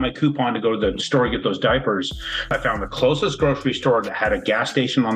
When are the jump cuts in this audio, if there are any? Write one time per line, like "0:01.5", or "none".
0:02.6